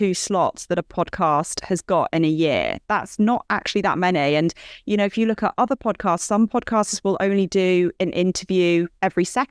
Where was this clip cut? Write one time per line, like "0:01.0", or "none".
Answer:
none